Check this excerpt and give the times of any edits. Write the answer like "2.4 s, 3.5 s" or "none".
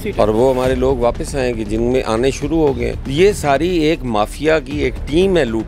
3.0 s